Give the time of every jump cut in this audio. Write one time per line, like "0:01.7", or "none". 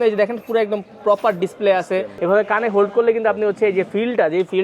0:02.1